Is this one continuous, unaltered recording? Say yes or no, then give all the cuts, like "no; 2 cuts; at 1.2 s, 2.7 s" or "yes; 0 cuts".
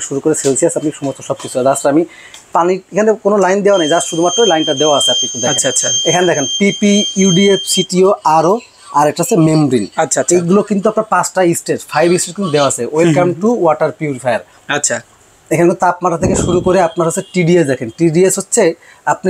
yes; 0 cuts